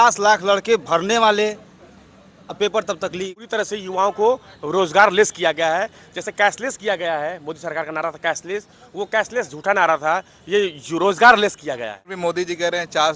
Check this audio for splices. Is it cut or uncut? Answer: cut